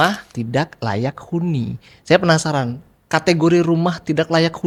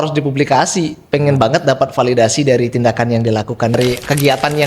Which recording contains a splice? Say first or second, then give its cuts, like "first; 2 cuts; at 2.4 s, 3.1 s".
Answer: second; 1 cut; at 3.8 s